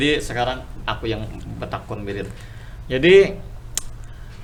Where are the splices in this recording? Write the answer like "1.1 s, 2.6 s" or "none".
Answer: none